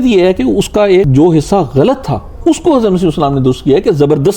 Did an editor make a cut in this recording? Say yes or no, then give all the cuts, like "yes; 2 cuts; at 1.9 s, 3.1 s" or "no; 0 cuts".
yes; 1 cut; at 1.1 s